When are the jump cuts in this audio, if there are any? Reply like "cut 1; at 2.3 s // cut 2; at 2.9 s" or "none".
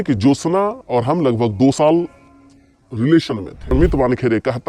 cut 1; at 3.7 s